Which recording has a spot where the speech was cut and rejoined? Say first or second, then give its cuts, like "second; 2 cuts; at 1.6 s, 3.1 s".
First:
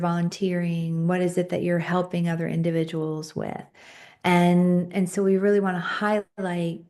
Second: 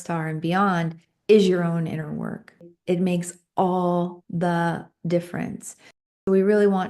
second; 2 cuts; at 2.7 s, 6.0 s